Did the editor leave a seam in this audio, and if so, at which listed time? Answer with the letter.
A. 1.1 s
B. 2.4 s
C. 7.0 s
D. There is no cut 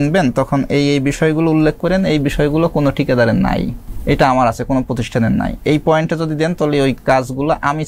C